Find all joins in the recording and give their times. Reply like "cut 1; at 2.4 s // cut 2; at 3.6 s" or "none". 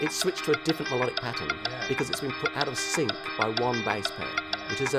none

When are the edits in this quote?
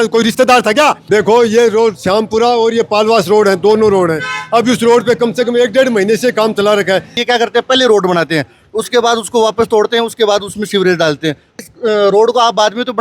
cut 1; at 1.0 s // cut 2; at 7.1 s // cut 3; at 11.6 s

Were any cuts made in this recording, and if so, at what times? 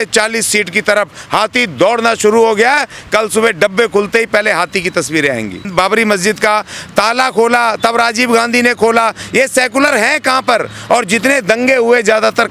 cut 1; at 5.7 s

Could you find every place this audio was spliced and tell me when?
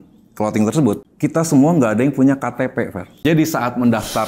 cut 1; at 1.1 s // cut 2; at 3.0 s

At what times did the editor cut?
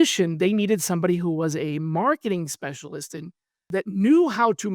cut 1; at 3.6 s

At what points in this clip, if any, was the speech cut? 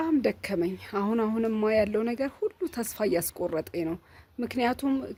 none

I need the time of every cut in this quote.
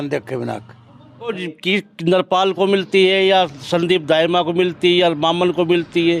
cut 1; at 1.4 s

